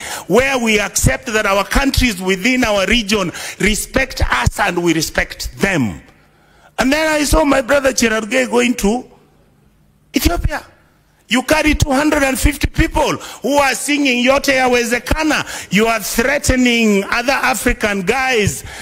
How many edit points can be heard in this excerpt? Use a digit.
0